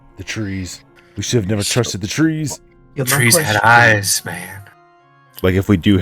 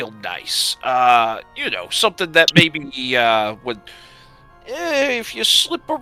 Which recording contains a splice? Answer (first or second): first